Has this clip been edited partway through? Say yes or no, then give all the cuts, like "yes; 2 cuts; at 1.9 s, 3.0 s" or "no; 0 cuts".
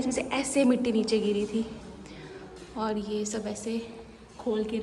no; 0 cuts